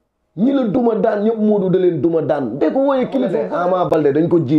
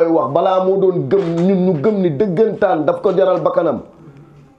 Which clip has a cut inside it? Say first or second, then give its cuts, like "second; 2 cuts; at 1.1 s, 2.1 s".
first; 1 cut; at 3.4 s